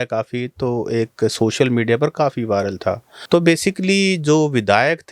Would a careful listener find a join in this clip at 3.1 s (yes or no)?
yes